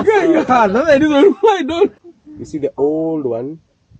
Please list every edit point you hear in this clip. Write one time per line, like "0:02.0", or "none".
0:01.9